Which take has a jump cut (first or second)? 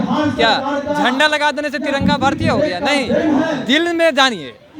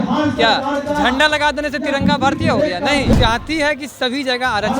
second